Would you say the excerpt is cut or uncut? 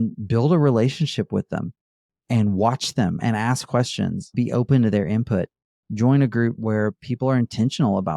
cut